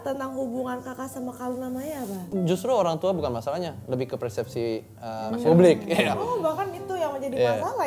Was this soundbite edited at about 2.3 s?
yes; 1 cut; at 2.3 s

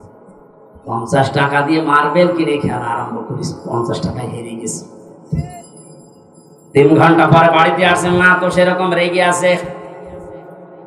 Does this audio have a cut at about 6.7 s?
no; 0 cuts

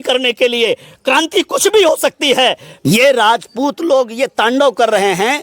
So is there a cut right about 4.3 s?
no; 1 cut; at 2.7 s

